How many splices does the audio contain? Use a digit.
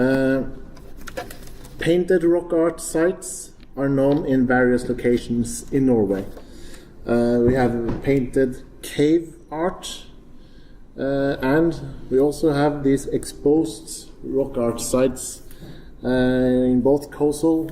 1